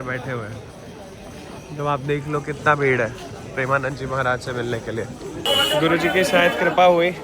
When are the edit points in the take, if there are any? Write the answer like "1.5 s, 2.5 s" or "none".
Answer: 5.5 s

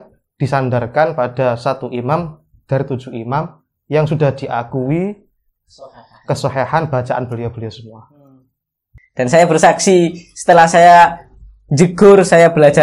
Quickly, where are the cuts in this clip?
8.8 s

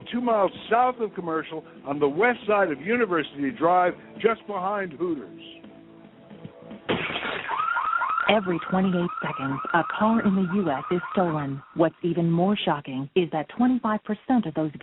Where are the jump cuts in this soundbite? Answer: 6.8 s

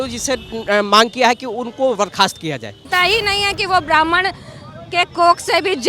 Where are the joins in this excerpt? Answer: 2.8 s

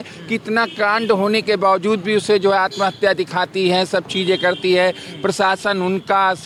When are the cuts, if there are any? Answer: none

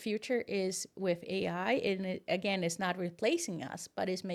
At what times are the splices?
none

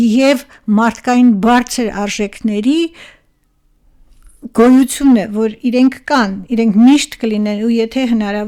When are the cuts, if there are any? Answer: none

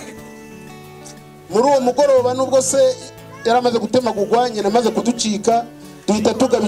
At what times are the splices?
none

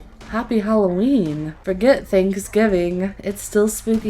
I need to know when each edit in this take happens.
1.5 s

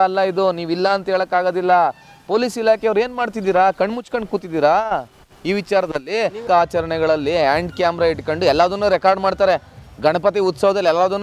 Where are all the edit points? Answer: 6.4 s

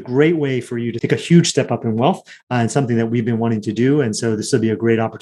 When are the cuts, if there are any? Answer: 1.0 s

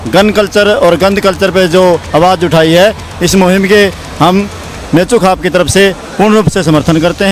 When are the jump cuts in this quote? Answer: none

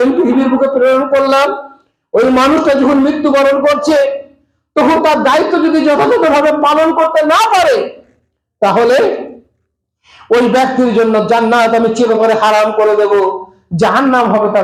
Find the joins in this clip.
none

